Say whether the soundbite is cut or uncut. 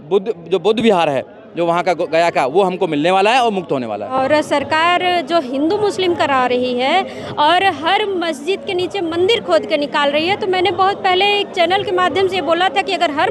cut